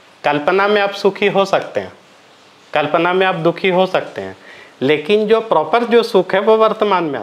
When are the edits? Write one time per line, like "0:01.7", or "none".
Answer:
none